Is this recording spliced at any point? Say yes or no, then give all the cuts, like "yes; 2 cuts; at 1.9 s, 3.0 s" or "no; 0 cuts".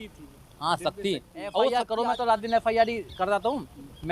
yes; 1 cut; at 1.7 s